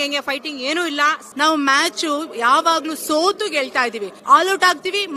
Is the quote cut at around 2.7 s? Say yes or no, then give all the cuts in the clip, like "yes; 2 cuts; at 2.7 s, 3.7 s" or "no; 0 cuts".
no; 2 cuts; at 1.2 s, 4.1 s